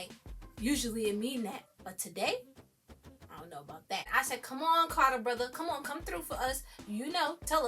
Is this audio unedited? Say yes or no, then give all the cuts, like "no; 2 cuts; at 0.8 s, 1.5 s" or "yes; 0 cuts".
no; 1 cut; at 4.1 s